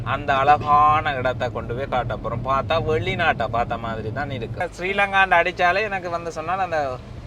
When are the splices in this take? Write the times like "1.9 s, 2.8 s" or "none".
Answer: 4.7 s